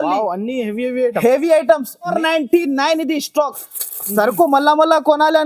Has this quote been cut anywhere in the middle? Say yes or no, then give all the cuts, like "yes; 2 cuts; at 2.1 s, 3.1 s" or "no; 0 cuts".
yes; 1 cut; at 2.1 s